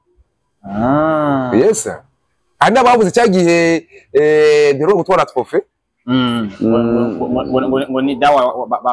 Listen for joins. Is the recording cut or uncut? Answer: uncut